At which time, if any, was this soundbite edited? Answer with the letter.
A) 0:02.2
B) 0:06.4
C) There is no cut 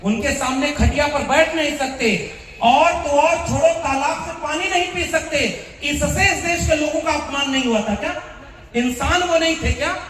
C